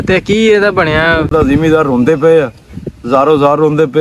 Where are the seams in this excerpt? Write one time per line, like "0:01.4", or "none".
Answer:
0:01.3